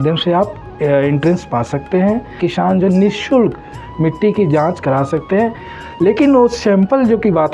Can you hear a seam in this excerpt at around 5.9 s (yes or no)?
no